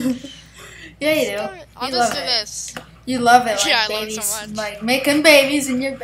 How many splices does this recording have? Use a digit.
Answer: 0